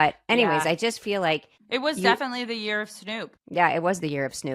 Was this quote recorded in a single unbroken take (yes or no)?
no